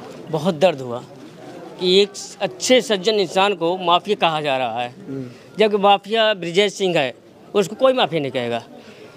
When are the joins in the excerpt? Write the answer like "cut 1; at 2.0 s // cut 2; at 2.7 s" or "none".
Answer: none